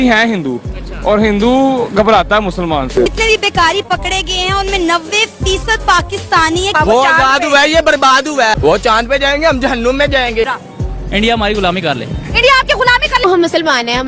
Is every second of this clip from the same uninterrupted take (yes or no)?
no